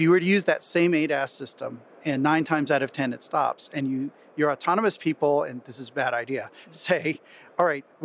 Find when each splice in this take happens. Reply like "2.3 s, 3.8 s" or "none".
none